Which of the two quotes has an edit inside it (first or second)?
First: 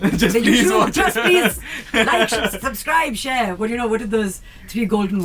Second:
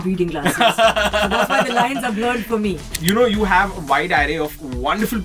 second